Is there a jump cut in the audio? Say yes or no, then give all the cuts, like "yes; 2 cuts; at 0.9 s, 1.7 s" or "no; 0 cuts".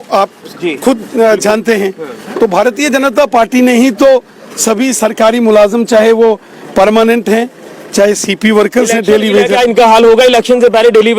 yes; 1 cut; at 9.5 s